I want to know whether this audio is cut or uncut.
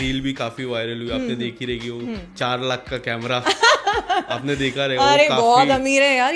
uncut